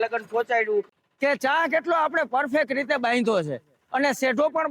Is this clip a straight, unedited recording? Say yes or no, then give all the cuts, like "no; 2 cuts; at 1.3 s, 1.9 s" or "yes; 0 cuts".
no; 1 cut; at 1.0 s